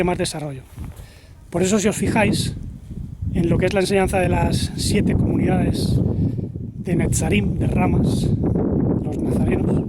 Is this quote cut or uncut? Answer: uncut